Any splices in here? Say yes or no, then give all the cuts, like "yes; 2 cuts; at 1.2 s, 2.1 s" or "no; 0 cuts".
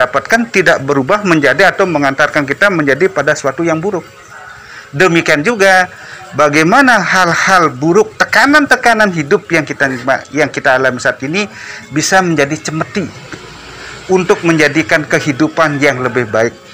no; 0 cuts